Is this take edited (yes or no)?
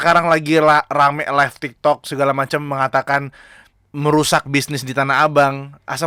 no